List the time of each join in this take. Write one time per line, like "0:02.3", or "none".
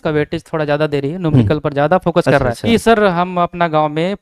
0:02.7